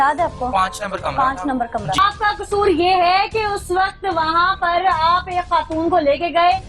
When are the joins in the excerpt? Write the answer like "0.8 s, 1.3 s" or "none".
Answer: 2.0 s